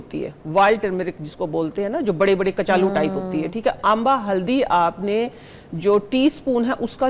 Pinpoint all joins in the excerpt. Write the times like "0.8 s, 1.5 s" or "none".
none